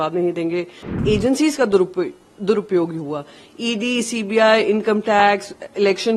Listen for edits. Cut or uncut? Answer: cut